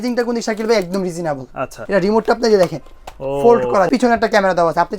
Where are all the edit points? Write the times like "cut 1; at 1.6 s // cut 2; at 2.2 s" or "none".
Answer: cut 1; at 1.8 s // cut 2; at 3.9 s